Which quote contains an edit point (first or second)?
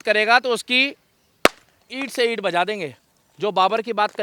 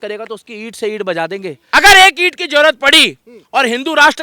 second